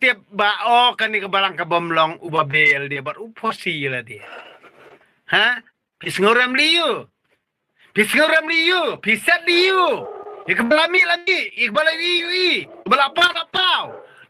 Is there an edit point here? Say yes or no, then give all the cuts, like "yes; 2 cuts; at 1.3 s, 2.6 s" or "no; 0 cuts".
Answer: no; 0 cuts